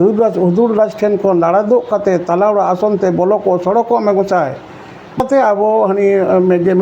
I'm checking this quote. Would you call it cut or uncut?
cut